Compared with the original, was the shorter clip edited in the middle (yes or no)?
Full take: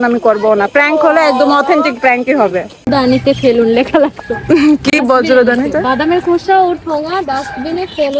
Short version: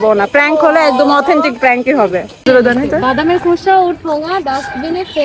yes